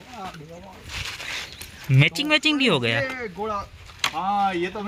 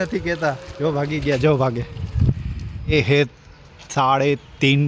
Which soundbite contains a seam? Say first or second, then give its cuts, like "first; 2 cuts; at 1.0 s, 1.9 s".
second; 1 cut; at 2.9 s